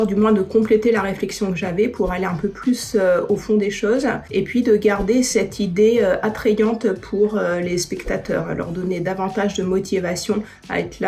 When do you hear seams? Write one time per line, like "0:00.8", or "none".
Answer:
none